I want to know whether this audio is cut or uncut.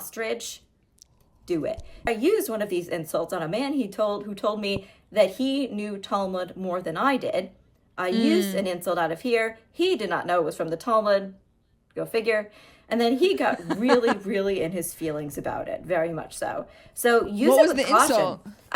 cut